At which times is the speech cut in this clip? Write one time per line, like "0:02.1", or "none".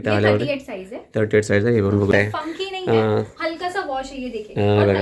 0:02.2